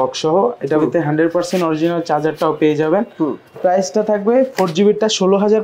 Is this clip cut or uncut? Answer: uncut